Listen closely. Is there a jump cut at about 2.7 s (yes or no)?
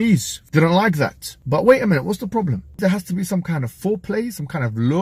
yes